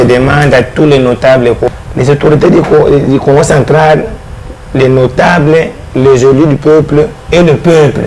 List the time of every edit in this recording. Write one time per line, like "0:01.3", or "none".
0:01.7